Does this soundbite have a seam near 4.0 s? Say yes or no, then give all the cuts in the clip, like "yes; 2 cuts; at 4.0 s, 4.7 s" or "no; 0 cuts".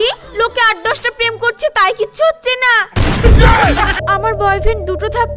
yes; 1 cut; at 4.0 s